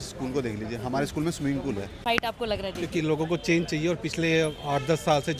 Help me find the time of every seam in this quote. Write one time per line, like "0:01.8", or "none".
0:02.0